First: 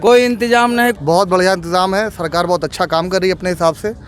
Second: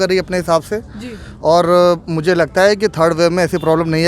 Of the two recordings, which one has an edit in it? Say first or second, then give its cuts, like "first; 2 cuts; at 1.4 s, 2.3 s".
first; 1 cut; at 1.0 s